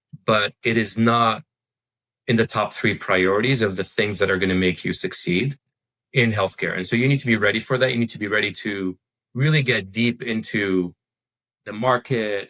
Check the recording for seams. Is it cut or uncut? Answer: uncut